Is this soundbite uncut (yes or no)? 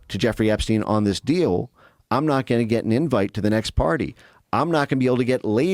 yes